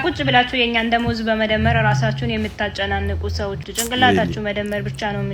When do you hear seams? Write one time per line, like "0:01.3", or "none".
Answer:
0:03.6